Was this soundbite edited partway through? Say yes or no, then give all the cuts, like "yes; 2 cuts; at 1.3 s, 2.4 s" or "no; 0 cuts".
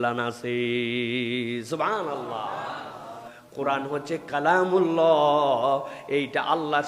yes; 1 cut; at 3.3 s